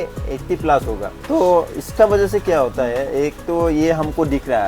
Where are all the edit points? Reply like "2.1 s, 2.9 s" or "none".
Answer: none